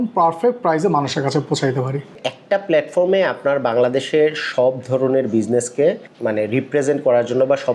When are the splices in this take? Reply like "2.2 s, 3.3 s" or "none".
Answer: 2.1 s